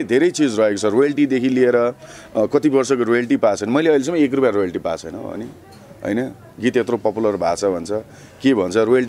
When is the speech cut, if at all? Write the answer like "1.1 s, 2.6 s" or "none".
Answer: none